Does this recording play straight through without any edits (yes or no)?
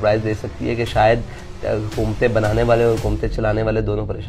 yes